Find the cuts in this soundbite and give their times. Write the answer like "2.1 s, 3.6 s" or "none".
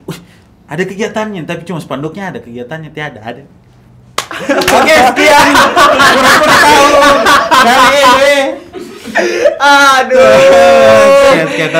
none